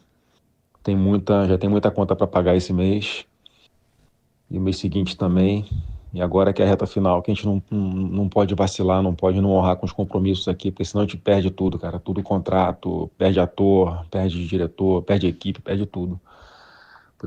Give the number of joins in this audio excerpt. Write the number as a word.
zero